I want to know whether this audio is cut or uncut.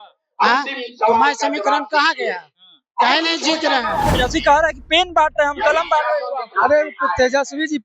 cut